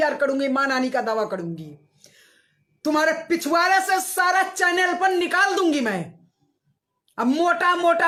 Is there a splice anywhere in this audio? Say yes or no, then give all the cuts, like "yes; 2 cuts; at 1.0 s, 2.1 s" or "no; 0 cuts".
no; 0 cuts